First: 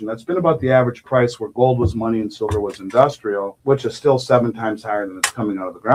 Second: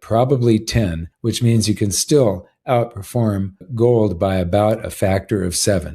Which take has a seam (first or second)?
second